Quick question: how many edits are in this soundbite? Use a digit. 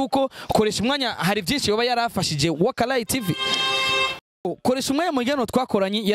1